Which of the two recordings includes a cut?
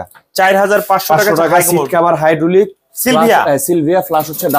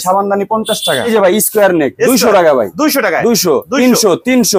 second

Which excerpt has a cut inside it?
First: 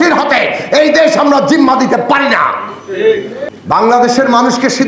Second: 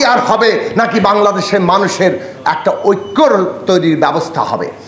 first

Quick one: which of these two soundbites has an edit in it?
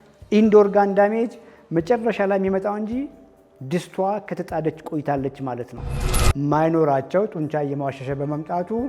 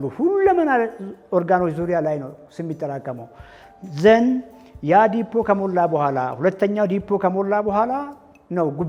first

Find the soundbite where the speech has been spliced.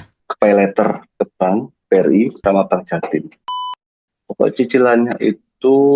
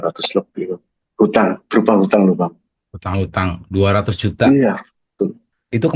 first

